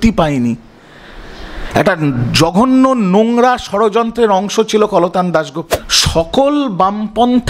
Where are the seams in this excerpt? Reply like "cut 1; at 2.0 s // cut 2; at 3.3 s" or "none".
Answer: cut 1; at 5.6 s